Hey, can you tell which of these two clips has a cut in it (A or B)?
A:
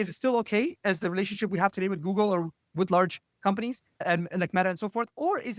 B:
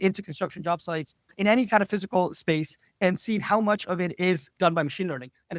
B